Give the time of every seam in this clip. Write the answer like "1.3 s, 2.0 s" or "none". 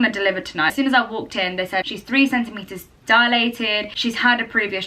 none